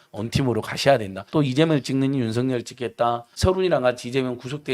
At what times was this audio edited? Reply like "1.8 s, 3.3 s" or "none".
1.3 s, 3.3 s